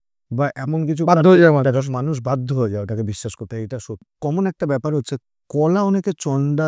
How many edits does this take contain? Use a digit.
1